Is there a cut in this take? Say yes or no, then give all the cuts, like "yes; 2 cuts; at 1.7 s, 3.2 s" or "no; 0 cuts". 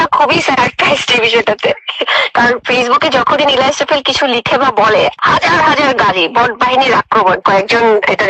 yes; 2 cuts; at 5.2 s, 7.4 s